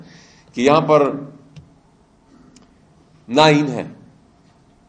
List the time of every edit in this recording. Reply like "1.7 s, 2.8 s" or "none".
none